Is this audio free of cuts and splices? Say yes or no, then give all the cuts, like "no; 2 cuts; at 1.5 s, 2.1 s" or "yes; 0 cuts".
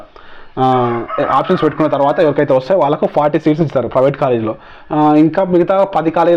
yes; 0 cuts